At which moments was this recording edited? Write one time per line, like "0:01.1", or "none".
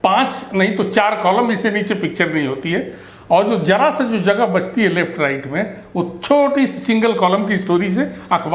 none